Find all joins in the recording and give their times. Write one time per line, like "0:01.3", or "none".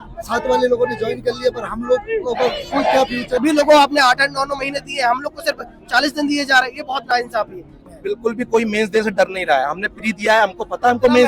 0:03.4
0:07.9

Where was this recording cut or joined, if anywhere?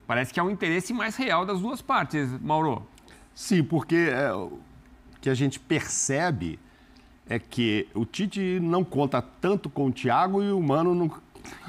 none

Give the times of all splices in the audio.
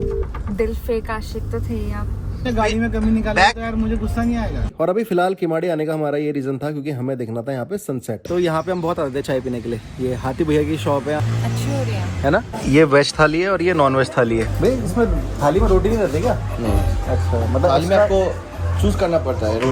0:02.4
0:04.6
0:08.2
0:11.2
0:12.5
0:14.5

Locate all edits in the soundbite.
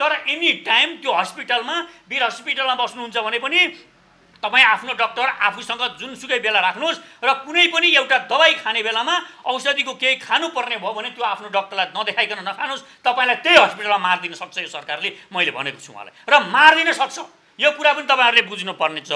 none

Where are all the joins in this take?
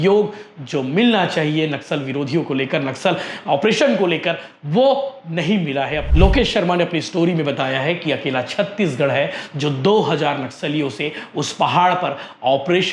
0:06.0

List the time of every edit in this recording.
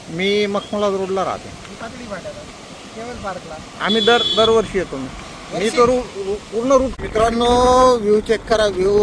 0:06.9

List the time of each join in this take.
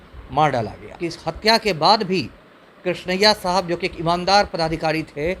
0:01.1

